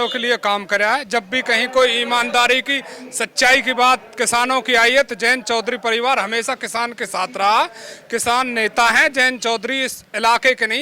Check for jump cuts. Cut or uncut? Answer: uncut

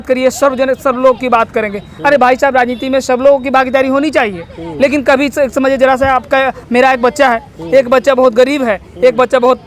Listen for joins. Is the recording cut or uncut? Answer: uncut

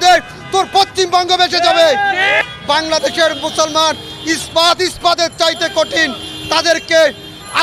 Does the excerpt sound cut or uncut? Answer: cut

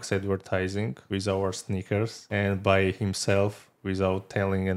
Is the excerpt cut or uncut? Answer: cut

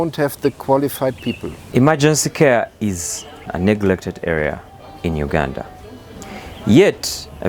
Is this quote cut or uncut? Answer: cut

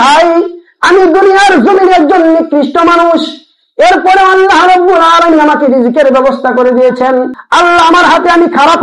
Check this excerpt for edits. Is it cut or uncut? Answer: cut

